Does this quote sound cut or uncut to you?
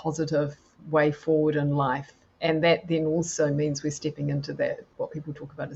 uncut